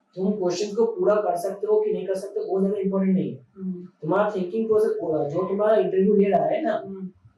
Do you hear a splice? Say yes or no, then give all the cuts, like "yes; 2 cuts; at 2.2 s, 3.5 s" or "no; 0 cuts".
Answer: no; 0 cuts